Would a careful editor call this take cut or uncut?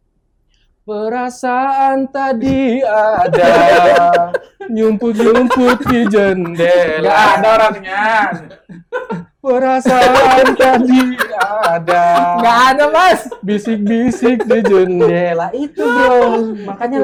uncut